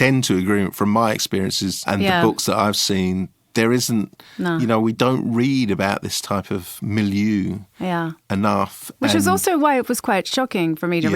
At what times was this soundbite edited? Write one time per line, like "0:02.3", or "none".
0:01.9